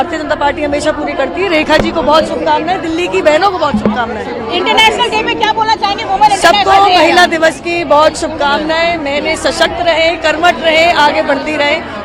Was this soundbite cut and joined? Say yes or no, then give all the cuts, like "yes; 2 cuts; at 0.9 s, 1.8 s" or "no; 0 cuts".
no; 0 cuts